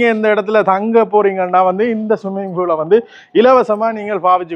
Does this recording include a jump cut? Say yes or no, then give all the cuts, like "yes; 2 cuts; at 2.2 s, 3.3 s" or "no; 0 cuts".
no; 0 cuts